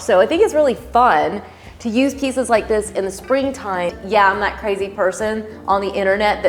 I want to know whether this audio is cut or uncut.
cut